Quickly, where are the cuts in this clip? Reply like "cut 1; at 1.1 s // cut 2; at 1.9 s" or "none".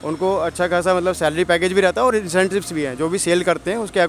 none